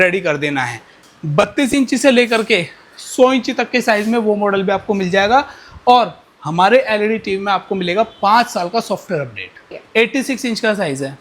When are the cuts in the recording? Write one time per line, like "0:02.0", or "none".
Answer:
0:01.0
0:09.7